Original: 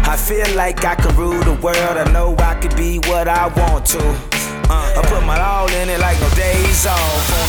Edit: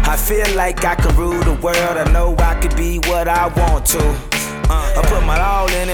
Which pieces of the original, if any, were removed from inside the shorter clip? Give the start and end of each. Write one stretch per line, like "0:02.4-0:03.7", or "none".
none